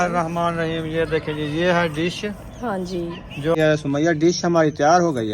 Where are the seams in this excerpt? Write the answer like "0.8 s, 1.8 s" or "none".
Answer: 3.6 s